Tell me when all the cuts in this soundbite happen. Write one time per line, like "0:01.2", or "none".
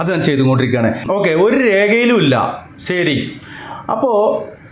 0:01.0